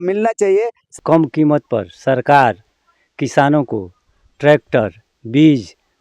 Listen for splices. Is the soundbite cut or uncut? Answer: cut